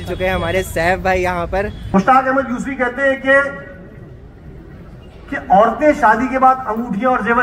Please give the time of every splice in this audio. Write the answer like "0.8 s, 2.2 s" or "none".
1.8 s